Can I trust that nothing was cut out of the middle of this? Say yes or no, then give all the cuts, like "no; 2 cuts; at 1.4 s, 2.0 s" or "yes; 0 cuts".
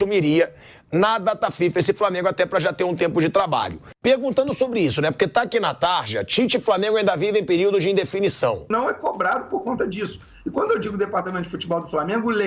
no; 1 cut; at 8.7 s